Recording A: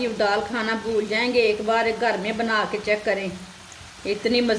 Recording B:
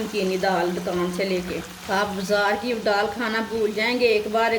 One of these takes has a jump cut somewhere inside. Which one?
B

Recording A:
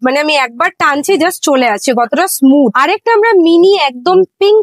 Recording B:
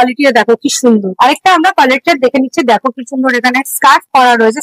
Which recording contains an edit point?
B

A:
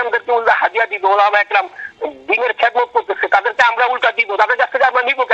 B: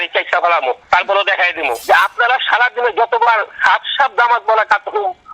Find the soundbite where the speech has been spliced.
B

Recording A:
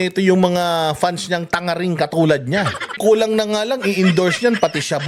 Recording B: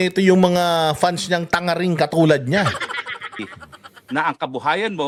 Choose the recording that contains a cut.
A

